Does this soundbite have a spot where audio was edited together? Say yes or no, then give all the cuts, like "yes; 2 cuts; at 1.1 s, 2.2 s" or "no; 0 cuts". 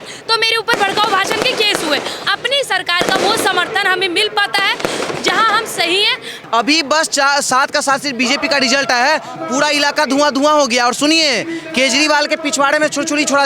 yes; 2 cuts; at 2.2 s, 6.3 s